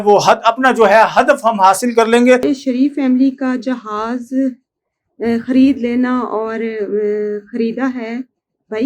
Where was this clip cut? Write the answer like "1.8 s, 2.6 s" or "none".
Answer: 2.4 s